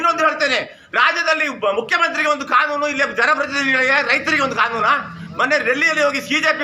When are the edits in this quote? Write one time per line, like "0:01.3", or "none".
none